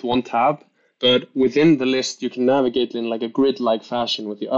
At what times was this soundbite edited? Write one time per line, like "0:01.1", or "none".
none